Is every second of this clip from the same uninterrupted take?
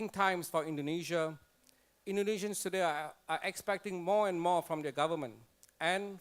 no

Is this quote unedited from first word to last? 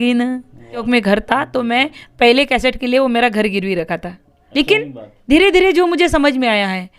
no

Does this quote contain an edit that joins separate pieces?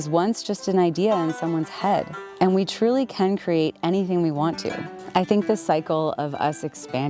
no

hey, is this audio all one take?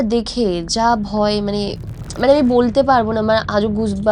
yes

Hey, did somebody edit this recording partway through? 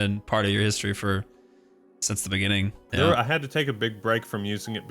yes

